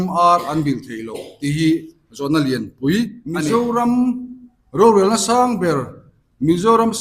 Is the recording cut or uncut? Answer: cut